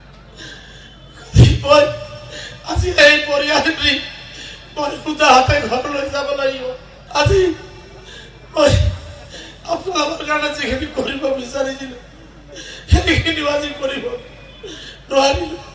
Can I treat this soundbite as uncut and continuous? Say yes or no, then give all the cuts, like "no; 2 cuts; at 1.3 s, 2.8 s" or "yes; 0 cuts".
no; 1 cut; at 6.9 s